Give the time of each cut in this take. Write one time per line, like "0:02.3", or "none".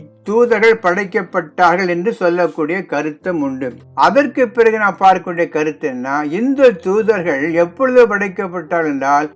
0:03.8